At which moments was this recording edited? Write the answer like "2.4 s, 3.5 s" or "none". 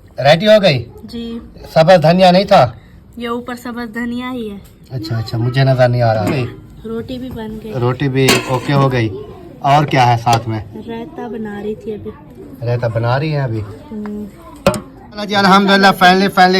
6.4 s, 15.1 s